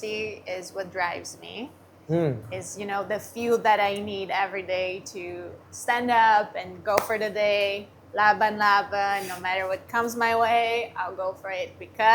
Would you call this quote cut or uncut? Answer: uncut